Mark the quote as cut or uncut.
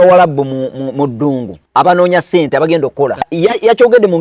cut